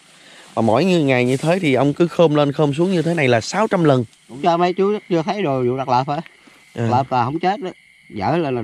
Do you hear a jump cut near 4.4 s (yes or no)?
yes